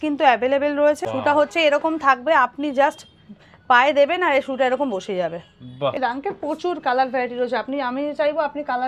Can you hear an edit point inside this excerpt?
yes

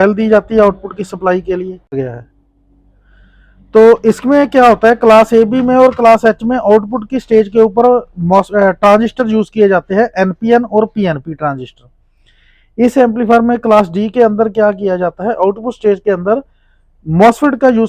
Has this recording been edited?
yes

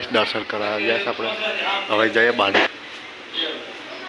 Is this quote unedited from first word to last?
no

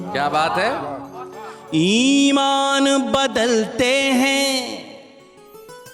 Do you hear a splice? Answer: no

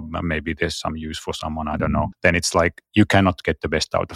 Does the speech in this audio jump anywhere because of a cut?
yes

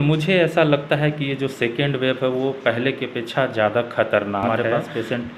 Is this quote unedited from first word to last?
no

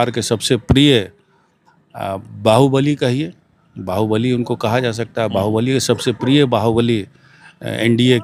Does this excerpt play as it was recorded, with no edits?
yes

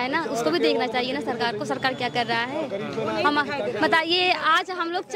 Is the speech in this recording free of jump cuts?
yes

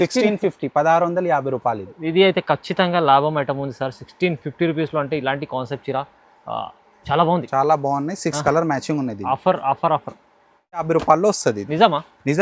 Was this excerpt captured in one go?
no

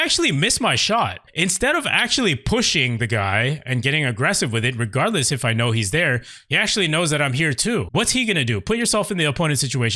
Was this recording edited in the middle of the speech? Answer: yes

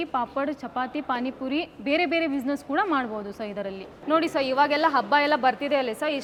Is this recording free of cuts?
yes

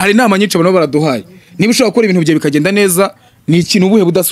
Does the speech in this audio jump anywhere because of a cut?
no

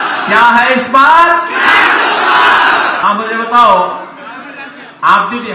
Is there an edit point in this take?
yes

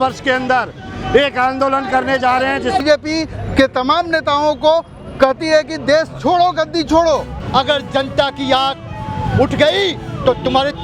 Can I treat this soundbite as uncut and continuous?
no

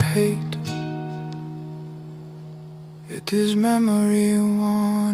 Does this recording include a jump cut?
yes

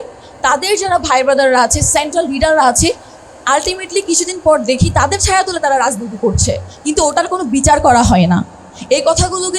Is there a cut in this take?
no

